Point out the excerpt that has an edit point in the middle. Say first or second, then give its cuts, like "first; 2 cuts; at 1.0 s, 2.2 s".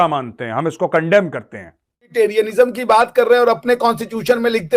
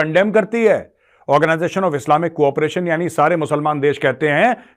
first; 1 cut; at 2.1 s